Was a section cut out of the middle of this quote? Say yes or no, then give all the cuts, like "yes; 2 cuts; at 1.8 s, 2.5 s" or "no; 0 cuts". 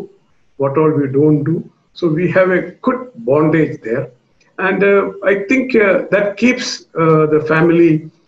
no; 0 cuts